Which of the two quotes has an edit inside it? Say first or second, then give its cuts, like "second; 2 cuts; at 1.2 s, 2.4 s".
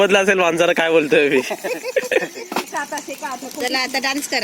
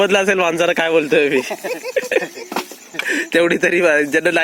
first; 1 cut; at 2.7 s